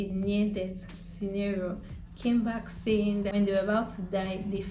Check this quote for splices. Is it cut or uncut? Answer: cut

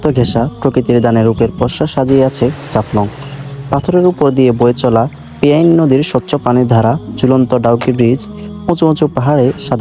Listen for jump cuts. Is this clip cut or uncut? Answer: uncut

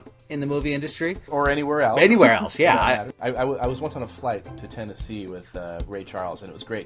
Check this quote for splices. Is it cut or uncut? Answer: cut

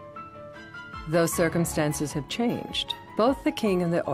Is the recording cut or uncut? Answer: cut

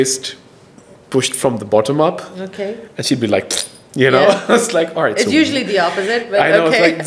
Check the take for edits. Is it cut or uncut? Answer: uncut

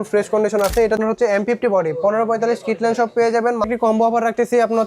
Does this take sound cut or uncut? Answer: cut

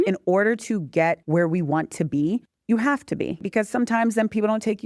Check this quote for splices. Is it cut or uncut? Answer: cut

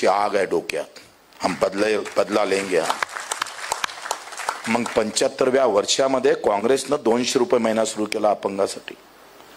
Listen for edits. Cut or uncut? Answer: uncut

